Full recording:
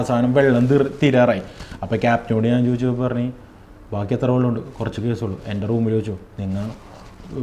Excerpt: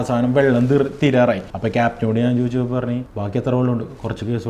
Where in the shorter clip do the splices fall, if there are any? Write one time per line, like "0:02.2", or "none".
0:01.5
0:03.1